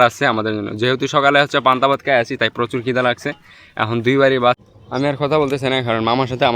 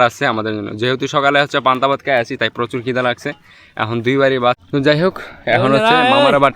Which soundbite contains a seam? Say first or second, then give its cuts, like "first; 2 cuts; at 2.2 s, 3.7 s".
first; 1 cut; at 4.6 s